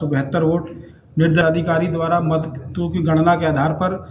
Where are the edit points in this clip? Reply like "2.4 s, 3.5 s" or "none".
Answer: 1.4 s